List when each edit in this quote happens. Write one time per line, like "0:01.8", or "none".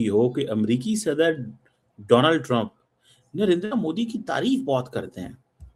none